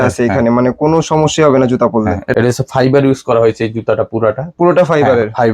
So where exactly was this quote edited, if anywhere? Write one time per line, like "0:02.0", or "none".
0:02.2